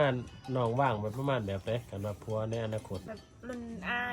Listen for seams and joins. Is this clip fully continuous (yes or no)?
no